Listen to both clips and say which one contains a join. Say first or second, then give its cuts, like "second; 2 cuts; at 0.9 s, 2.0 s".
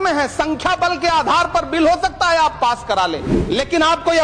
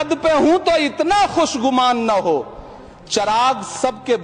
first; 1 cut; at 3.3 s